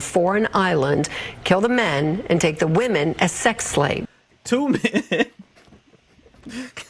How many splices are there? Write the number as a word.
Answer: one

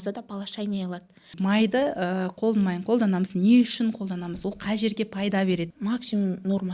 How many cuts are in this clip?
two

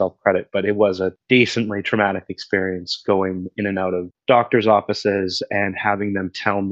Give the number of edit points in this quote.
one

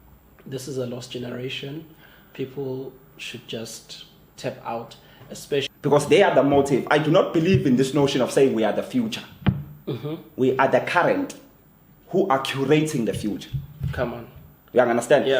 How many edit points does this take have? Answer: one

